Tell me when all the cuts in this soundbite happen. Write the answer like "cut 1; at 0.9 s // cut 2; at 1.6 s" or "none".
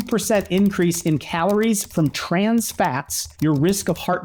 none